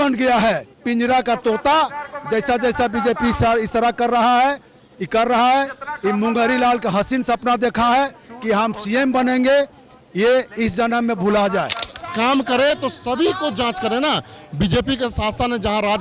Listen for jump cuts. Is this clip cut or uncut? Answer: cut